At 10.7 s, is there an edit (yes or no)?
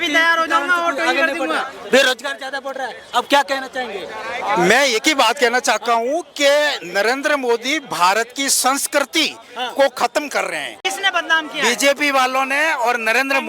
yes